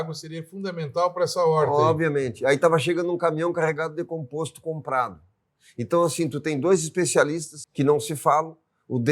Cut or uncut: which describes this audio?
cut